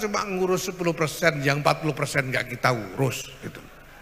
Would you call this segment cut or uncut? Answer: uncut